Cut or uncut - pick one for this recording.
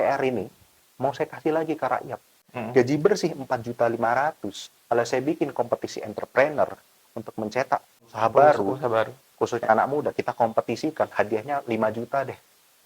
cut